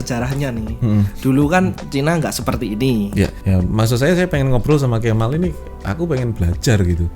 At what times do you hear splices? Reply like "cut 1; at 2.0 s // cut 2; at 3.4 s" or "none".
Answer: cut 1; at 3.4 s